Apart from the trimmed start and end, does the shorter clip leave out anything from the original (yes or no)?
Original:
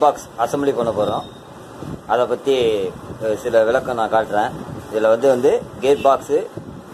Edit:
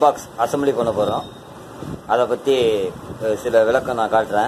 no